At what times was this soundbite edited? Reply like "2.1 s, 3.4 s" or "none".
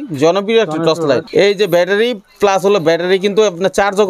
1.2 s